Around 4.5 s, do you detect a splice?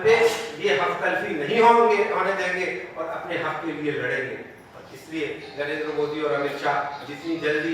no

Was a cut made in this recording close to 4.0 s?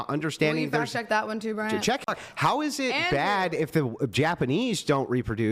no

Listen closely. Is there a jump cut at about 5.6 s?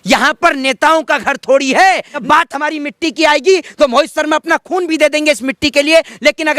no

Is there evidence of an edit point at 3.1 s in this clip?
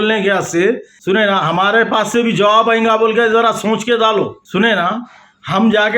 no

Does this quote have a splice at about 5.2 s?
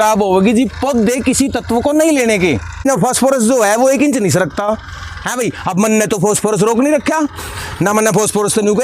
no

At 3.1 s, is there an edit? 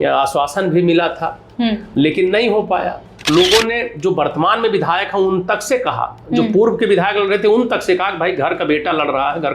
yes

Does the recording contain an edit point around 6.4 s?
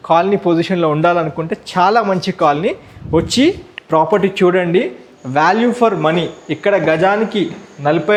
no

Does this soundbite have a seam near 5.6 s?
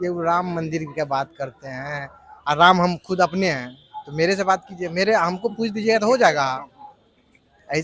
no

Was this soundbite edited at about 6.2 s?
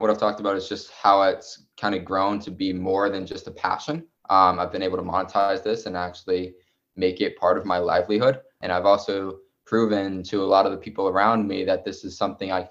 no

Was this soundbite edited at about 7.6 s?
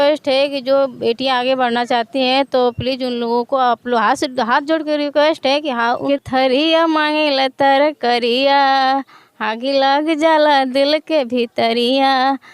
no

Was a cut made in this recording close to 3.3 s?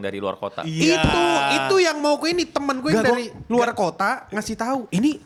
no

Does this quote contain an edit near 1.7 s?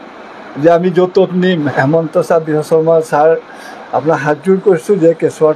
yes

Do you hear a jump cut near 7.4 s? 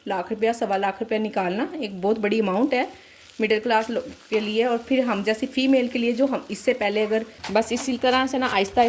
yes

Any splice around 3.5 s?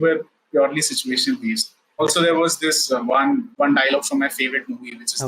yes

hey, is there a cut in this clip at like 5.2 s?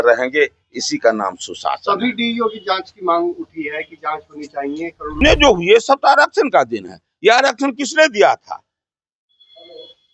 yes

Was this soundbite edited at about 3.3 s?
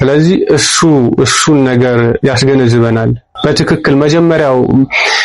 yes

